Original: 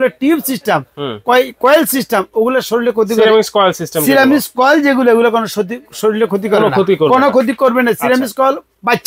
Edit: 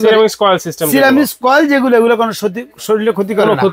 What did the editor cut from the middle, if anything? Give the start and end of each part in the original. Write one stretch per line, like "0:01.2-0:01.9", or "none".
none